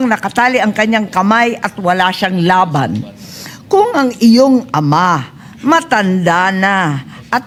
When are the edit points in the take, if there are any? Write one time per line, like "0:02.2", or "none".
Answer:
none